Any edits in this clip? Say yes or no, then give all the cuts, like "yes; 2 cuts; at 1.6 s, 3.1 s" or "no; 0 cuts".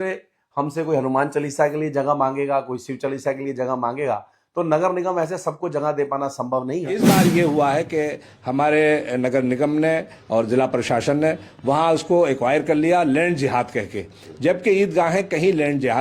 yes; 1 cut; at 7.1 s